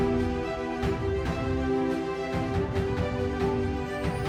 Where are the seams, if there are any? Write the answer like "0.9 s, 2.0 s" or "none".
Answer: none